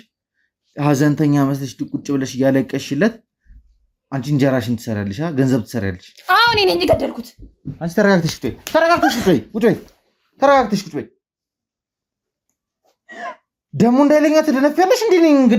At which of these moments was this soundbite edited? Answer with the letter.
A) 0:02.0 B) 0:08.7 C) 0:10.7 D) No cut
D